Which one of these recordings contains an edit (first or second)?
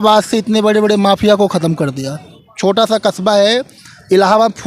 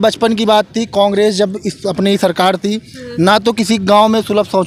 first